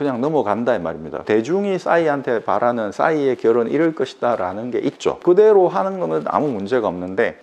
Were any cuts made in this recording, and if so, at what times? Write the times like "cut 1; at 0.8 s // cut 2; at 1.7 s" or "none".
cut 1; at 1.2 s